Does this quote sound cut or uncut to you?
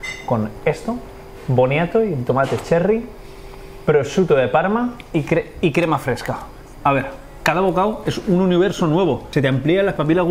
cut